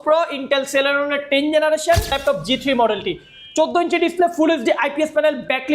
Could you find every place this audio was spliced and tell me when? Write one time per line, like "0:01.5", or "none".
0:02.2